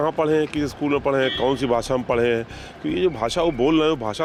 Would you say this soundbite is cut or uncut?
uncut